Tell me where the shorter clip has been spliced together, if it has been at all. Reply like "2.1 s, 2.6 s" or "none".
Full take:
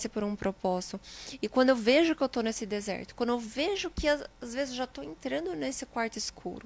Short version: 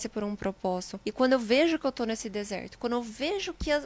1.0 s